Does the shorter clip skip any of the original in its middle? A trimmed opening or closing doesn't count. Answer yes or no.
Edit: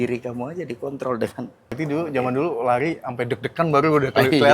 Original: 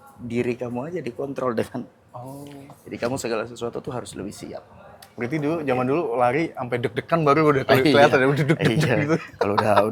yes